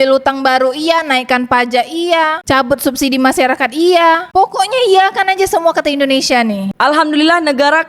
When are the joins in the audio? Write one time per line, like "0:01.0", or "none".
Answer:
none